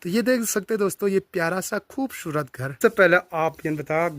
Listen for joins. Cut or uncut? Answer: cut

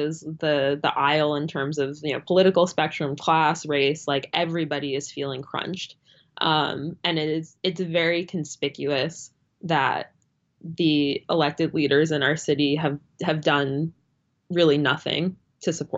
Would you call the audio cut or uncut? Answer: uncut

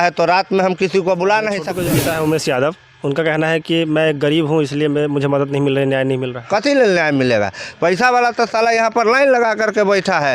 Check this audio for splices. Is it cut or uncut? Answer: cut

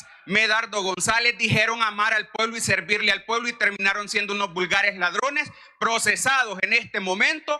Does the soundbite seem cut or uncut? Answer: uncut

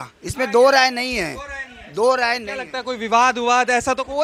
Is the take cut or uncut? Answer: uncut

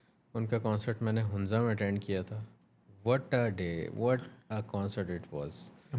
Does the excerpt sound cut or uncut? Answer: uncut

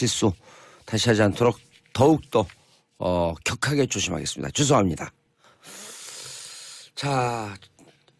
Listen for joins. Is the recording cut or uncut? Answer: uncut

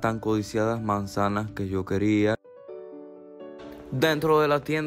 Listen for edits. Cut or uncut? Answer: cut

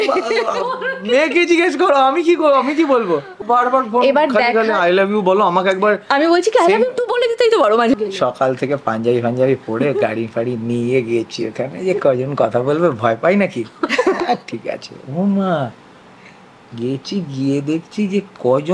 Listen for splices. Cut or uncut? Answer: cut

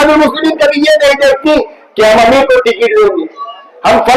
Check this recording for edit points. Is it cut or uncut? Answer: uncut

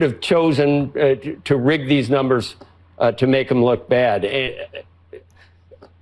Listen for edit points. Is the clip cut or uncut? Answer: cut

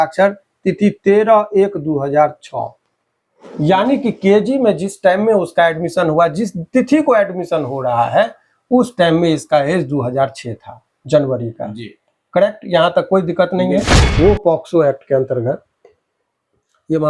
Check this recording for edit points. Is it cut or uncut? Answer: cut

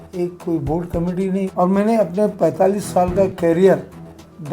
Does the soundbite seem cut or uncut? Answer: cut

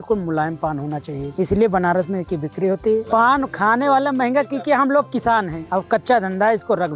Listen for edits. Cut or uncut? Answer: cut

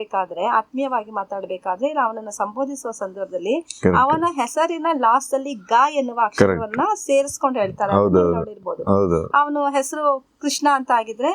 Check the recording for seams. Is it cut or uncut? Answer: uncut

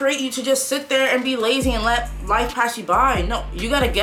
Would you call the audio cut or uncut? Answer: uncut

